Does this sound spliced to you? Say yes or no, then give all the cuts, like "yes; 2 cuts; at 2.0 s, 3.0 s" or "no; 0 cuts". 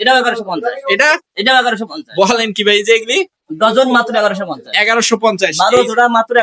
no; 0 cuts